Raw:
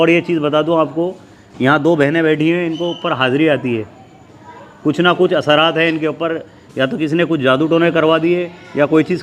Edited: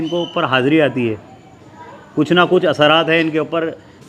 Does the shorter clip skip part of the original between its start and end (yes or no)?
no